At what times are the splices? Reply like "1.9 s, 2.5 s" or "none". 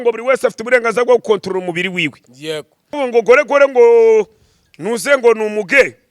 2.9 s

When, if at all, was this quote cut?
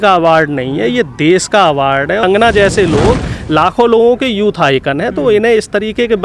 2.2 s

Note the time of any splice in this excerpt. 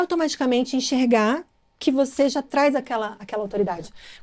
none

